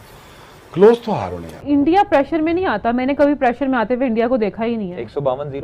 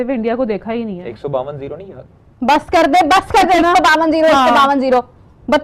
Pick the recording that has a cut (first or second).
first